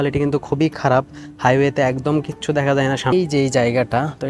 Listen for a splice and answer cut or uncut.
cut